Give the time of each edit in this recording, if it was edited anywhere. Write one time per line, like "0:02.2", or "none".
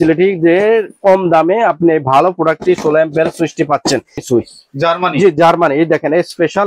0:04.2